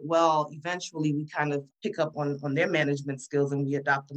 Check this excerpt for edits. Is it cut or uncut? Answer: uncut